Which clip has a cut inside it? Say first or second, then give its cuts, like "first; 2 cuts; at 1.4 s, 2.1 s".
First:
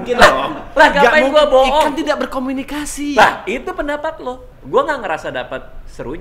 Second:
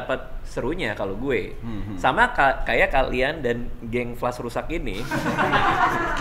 first; 1 cut; at 4.4 s